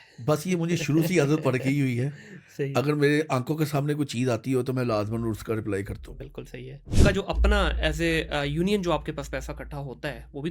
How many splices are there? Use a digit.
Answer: 1